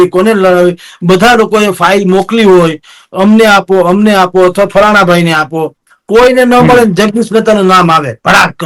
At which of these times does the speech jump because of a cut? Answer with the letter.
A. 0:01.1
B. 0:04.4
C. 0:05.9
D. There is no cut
D